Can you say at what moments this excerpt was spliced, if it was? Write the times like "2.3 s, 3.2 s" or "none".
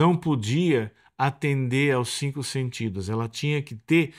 none